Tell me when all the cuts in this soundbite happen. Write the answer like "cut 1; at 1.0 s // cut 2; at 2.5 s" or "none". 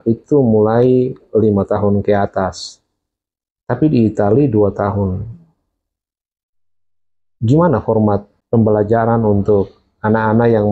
none